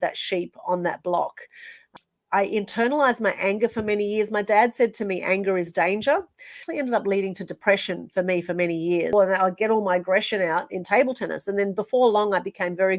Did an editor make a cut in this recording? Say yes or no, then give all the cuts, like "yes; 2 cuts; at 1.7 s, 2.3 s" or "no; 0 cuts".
yes; 3 cuts; at 1.8 s, 6.5 s, 9.1 s